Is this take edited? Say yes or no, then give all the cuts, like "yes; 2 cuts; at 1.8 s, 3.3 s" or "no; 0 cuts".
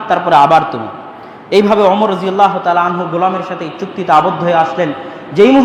no; 0 cuts